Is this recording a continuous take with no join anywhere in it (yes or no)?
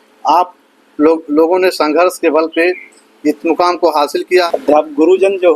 no